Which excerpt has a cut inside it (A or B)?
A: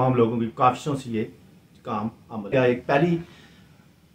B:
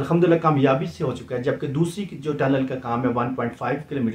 A